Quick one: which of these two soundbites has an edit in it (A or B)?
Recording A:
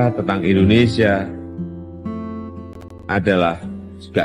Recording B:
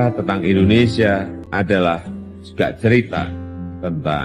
B